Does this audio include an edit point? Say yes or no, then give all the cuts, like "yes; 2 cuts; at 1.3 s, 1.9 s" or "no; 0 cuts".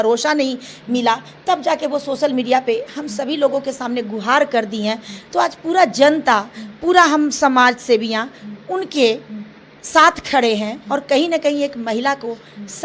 no; 0 cuts